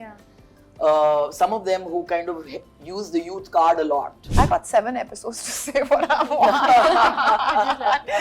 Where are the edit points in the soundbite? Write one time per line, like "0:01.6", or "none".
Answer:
0:04.2